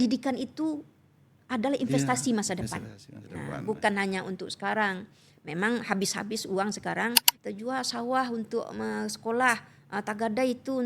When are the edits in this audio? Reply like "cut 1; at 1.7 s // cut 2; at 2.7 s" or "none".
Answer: cut 1; at 7.3 s